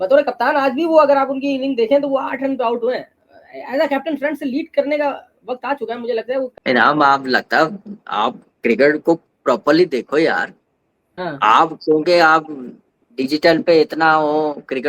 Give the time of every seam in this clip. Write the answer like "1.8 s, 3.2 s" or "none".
6.6 s